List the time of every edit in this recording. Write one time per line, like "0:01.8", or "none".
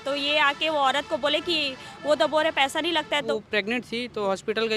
0:03.3